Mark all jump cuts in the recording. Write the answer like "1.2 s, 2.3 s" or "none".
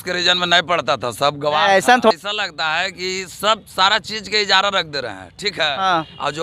2.1 s